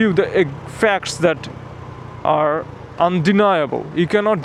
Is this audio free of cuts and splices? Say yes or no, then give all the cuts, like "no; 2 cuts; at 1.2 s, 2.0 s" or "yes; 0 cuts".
yes; 0 cuts